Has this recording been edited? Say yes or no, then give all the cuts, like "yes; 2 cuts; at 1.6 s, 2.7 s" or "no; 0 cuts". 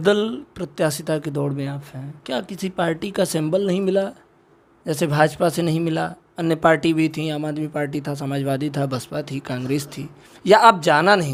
no; 0 cuts